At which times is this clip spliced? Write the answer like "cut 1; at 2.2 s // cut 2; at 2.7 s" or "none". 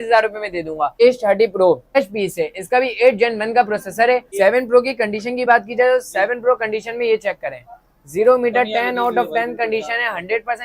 cut 1; at 0.9 s // cut 2; at 2.0 s // cut 3; at 4.3 s